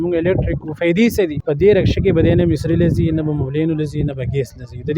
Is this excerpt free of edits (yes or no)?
no